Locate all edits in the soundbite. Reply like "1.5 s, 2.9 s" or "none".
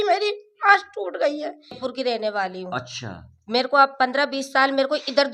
1.8 s